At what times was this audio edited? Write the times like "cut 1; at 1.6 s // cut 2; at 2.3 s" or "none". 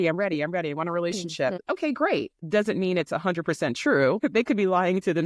cut 1; at 1.6 s // cut 2; at 2.4 s // cut 3; at 4.2 s